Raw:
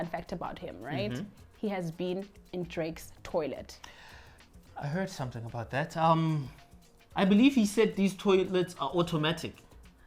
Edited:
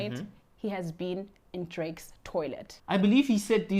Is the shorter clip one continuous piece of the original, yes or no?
no